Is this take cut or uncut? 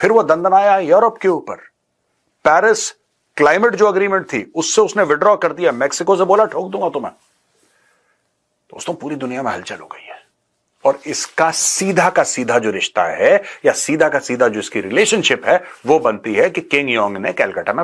uncut